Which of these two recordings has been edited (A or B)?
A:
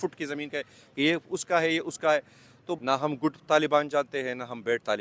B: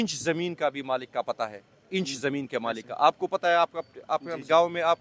A